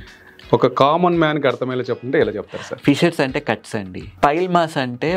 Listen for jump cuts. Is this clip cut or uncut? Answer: cut